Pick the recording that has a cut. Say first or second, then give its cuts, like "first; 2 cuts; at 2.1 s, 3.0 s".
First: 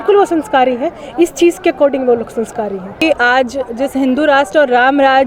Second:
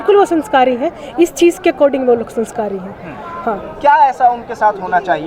first; 1 cut; at 3.0 s